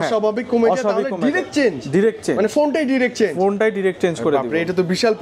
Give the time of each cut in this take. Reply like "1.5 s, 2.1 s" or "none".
none

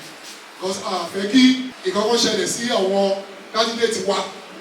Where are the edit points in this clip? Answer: 1.7 s

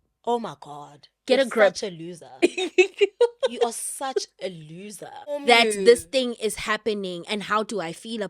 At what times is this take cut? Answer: 5.4 s

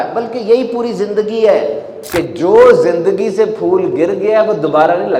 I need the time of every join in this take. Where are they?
1.9 s

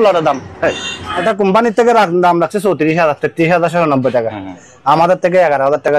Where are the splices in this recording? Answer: 1.2 s

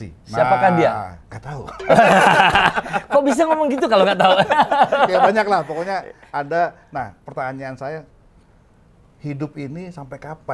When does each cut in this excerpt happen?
none

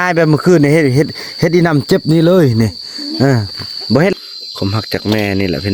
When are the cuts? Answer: 4.1 s

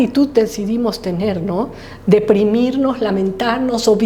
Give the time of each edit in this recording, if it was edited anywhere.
none

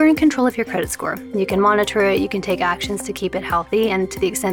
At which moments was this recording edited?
none

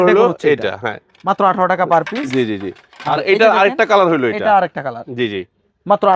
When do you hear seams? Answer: none

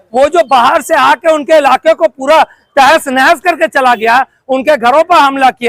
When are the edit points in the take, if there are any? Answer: none

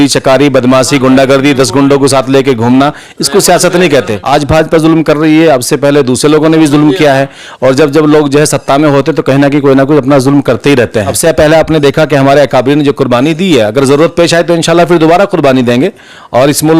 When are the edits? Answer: 4.2 s, 11.1 s

